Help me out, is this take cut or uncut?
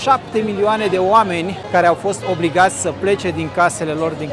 uncut